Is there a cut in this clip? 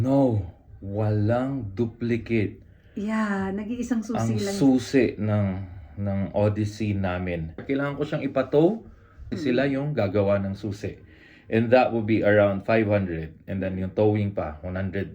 yes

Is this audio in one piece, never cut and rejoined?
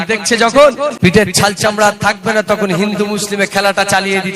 no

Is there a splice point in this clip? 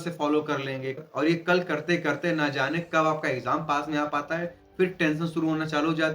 yes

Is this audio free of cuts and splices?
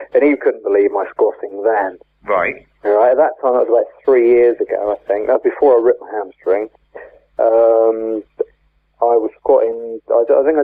yes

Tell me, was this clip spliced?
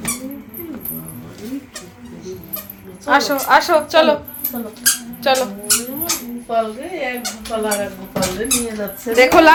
no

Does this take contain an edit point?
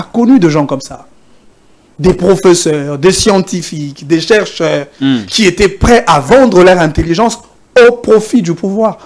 no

